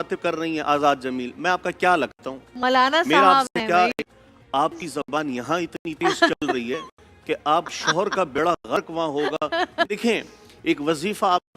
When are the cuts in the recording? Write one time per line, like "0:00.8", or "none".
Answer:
0:04.0
0:09.9